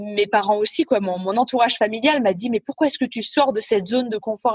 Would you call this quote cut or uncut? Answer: uncut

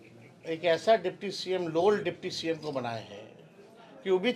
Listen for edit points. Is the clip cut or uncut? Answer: uncut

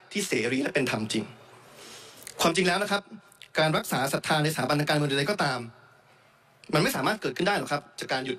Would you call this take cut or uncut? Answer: uncut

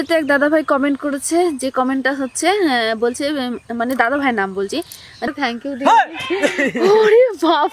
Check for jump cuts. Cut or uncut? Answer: cut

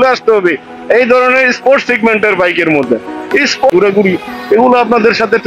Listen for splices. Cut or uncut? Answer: cut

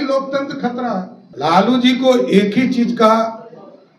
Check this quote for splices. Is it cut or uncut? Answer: cut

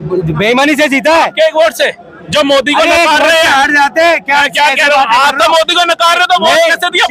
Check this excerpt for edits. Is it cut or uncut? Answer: uncut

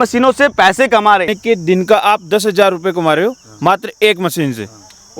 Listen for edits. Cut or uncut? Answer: cut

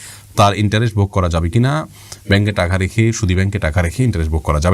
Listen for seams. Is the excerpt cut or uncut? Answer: uncut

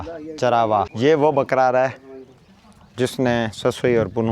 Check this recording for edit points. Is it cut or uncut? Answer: cut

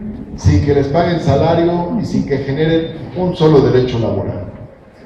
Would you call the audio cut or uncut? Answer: uncut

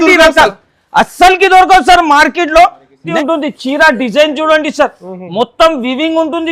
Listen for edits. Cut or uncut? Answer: cut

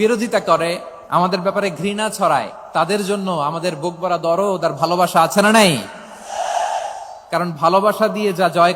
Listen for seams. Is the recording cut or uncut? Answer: cut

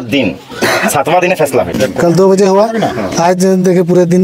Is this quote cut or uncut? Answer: cut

